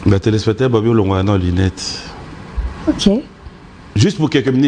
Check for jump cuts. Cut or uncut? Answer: uncut